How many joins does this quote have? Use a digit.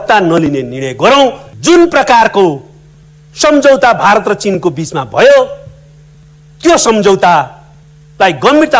1